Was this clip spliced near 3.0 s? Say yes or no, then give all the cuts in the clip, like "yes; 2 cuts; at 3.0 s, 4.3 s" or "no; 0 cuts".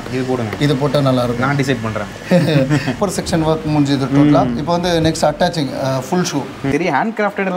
yes; 2 cuts; at 3.0 s, 6.7 s